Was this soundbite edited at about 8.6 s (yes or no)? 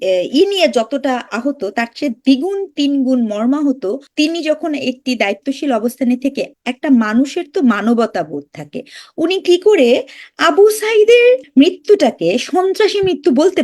no